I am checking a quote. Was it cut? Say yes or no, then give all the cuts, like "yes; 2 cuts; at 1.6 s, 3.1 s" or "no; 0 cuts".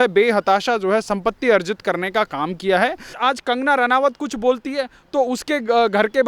yes; 1 cut; at 3.1 s